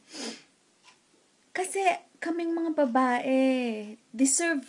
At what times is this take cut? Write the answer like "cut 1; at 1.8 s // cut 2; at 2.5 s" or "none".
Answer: cut 1; at 1.9 s